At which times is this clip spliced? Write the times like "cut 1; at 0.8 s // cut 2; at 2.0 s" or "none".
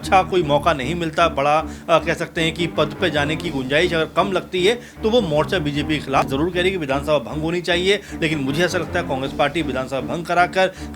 cut 1; at 6.2 s